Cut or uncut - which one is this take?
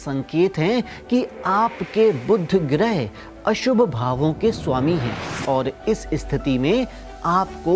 uncut